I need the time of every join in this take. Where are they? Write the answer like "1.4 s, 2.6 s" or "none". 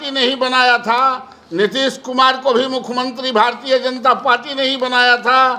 none